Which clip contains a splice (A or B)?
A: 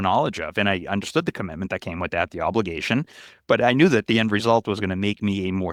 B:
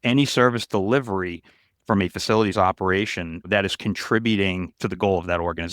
B